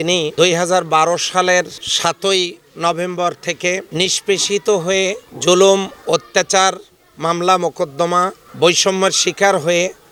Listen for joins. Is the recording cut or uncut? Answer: uncut